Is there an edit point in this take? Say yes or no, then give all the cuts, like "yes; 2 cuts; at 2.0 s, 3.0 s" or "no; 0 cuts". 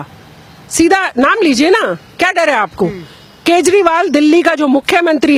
no; 0 cuts